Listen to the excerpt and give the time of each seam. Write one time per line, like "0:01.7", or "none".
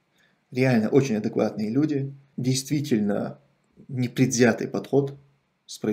0:02.3